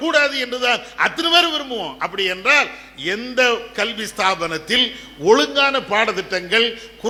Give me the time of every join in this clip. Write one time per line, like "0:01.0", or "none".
none

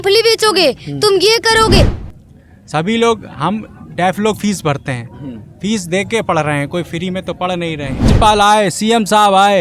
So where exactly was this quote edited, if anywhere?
0:02.0
0:08.1

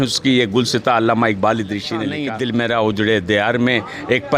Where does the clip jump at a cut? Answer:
0:02.1

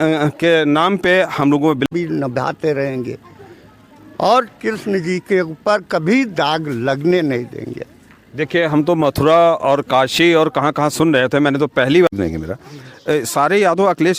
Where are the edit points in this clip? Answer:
0:01.9
0:12.1

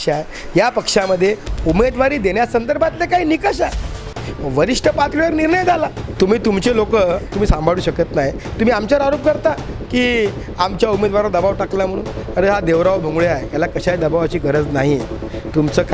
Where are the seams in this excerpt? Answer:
0:06.1

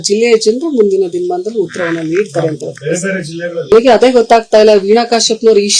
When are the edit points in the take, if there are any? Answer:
0:03.7

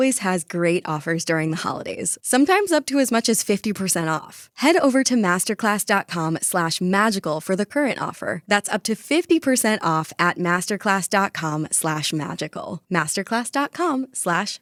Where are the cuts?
none

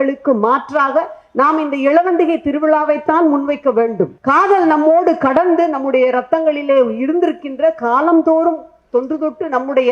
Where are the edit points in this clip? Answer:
0:04.2

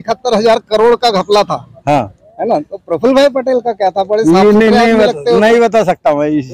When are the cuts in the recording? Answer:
none

